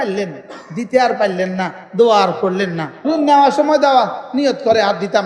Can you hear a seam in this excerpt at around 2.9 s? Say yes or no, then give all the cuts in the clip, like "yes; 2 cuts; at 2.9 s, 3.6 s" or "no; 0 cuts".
yes; 1 cut; at 2.9 s